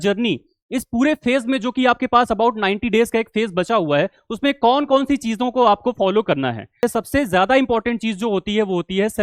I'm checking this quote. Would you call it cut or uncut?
cut